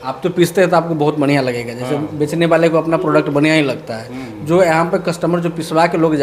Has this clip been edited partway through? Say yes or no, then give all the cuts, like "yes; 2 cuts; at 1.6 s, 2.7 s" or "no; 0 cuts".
no; 0 cuts